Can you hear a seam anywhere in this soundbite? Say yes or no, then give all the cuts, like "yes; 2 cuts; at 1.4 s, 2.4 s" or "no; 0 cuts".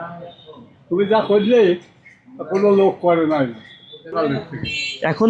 yes; 1 cut; at 4.1 s